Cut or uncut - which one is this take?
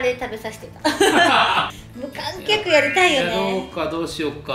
cut